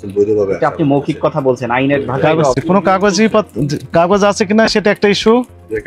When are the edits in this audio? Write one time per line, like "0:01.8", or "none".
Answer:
0:02.6